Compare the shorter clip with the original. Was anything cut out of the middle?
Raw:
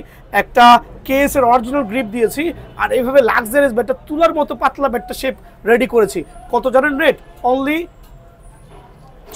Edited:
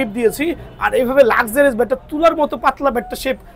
no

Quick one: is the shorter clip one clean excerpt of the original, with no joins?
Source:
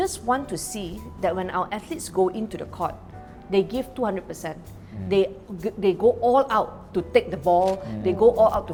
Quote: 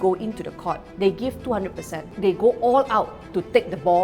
no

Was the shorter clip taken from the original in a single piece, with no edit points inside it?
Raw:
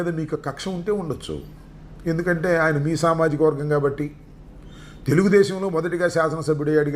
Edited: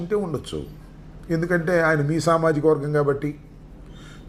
yes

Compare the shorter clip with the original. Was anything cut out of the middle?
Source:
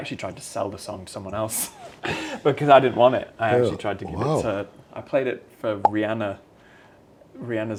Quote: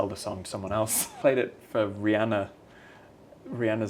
yes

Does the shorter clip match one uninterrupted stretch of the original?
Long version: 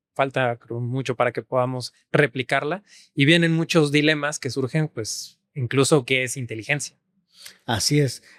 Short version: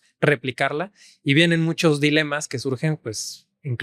yes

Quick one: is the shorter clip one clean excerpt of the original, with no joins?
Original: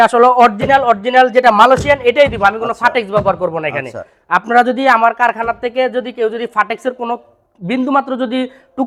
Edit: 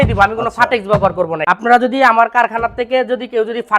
no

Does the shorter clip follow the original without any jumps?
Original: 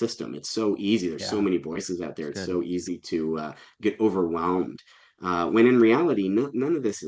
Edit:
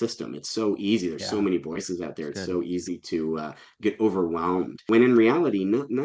no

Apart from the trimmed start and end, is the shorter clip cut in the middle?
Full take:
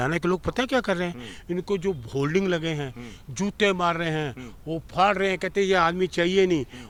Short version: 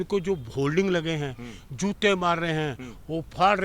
no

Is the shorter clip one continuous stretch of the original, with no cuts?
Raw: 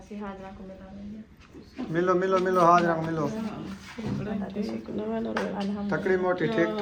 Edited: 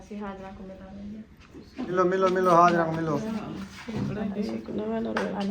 no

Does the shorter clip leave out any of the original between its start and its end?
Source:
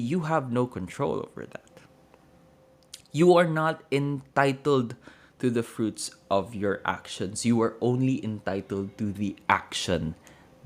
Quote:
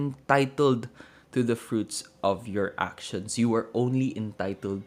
no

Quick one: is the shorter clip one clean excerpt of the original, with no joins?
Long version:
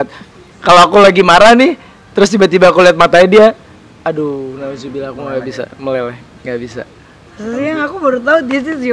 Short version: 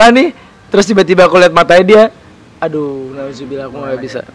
yes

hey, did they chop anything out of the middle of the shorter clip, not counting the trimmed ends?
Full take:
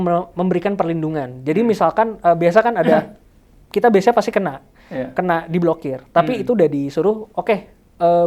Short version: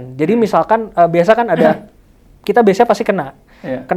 no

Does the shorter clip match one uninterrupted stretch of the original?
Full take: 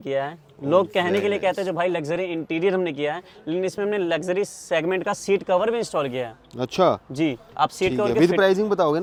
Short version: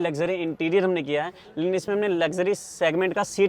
yes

